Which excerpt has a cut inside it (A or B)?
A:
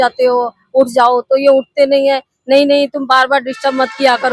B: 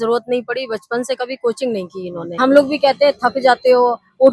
B